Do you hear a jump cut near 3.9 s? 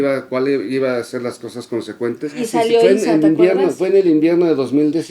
no; 1 cut; at 2.3 s

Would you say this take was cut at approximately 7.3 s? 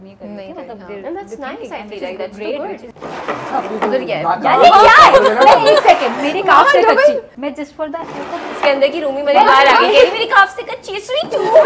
yes; 2 cuts; at 2.9 s, 7.3 s

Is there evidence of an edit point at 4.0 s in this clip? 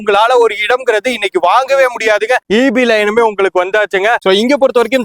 no; 1 cut; at 2.4 s

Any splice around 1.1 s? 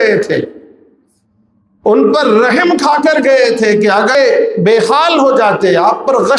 no; 1 cut; at 4.2 s

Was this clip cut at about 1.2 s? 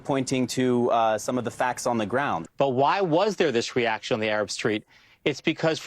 no; 1 cut; at 2.4 s

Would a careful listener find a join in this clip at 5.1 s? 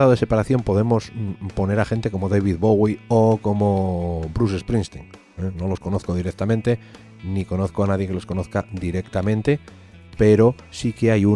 no; 1 cut; at 9.7 s

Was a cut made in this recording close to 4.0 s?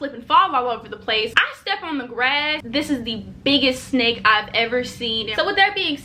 no; 3 cuts; at 1.3 s, 2.6 s, 5.3 s

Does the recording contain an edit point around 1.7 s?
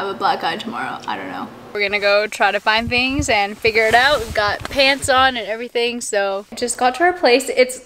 yes; 2 cuts; at 1.7 s, 6.6 s

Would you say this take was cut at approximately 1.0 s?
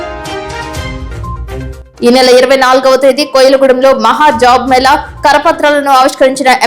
yes; 1 cut; at 1.0 s

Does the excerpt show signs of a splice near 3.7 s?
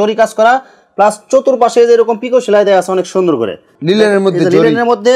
yes; 1 cut; at 3.7 s

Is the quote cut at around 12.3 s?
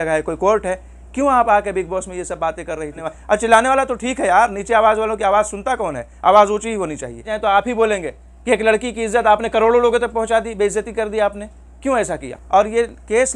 yes; 3 cuts; at 3.1 s, 7.3 s, 12.3 s

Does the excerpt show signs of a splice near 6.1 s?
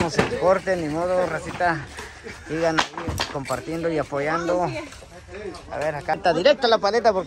yes; 1 cut; at 6.1 s

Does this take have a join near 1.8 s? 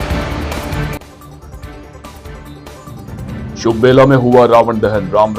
yes; 1 cut; at 1.8 s

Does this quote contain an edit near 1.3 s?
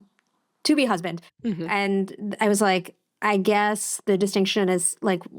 yes; 1 cut; at 1.3 s

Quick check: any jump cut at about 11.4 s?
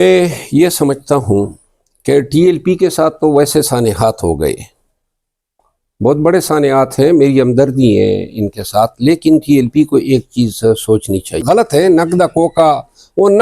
yes; 1 cut; at 11.4 s

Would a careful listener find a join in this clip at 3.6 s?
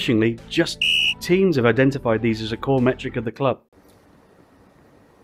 yes; 1 cut; at 3.6 s

